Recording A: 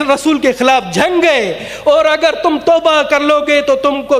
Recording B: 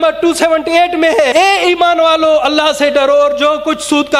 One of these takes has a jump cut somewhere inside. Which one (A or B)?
B